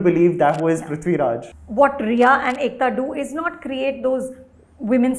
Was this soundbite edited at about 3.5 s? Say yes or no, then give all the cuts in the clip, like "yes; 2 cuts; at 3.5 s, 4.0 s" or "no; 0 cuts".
no; 1 cut; at 1.5 s